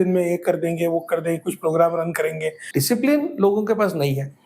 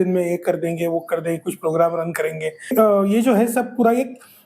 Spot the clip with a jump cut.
first; 1 cut; at 2.6 s

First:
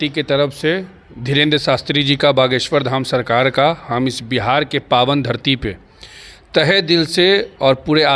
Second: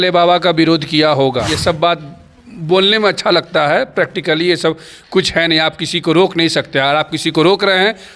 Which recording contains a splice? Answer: second; 1 cut; at 1.5 s

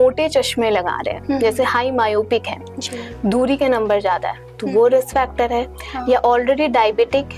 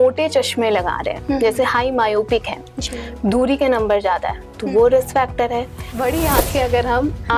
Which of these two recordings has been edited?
second; 1 cut; at 5.9 s

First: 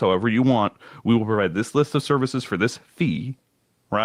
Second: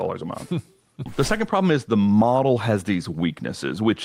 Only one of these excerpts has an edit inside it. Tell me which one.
second; 1 cut; at 1.1 s

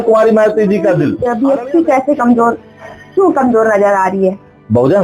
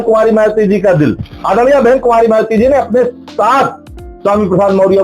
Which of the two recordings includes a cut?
first; 1 cut; at 1.2 s

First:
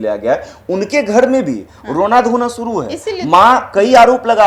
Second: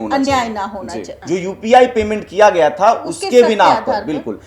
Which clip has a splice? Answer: second; 1 cut; at 1.1 s

